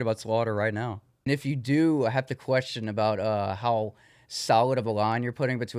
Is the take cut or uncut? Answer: cut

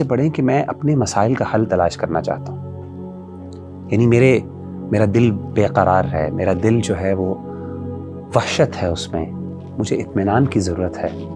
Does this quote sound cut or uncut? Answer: uncut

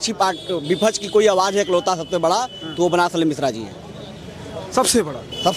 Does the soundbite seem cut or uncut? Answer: uncut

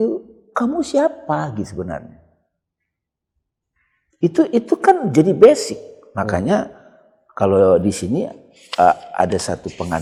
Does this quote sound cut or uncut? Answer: uncut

